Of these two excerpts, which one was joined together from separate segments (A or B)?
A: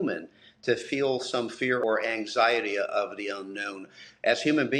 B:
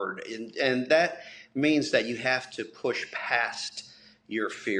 A